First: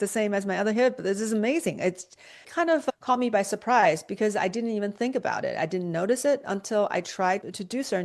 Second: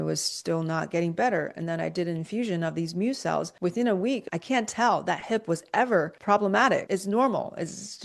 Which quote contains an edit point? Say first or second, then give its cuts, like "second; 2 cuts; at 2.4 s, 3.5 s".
second; 4 cuts; at 3.5 s, 4.2 s, 6.2 s, 6.8 s